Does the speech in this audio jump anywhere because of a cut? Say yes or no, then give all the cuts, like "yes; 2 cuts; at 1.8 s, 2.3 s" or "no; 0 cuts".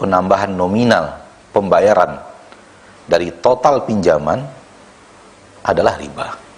no; 0 cuts